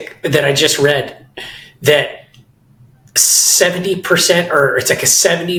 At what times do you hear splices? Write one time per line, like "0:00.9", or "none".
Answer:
none